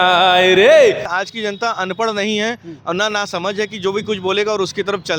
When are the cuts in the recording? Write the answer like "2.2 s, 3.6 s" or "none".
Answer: 1.1 s